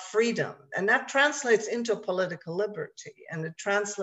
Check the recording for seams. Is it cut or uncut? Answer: uncut